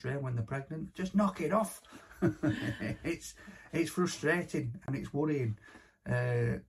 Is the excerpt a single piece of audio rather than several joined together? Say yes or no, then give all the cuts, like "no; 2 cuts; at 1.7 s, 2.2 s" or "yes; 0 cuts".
yes; 0 cuts